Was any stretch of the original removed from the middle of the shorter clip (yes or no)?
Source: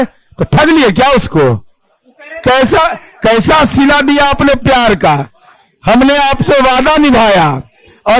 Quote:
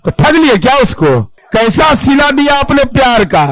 yes